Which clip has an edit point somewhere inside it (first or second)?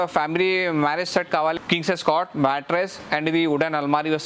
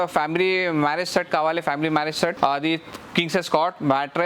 first